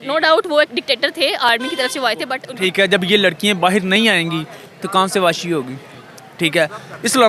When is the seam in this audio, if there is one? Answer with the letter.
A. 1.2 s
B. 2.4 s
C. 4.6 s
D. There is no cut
B